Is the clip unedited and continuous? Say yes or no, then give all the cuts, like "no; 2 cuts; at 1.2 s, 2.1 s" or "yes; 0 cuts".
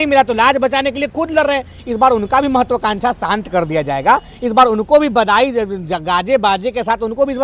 yes; 0 cuts